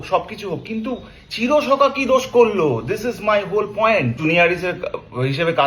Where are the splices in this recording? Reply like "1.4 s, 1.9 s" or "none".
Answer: 4.2 s